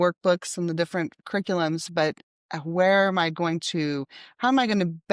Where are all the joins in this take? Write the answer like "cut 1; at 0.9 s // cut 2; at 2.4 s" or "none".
none